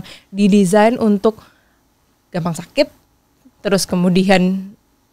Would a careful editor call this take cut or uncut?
uncut